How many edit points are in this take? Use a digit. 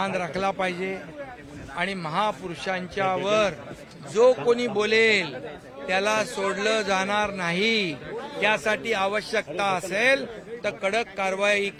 0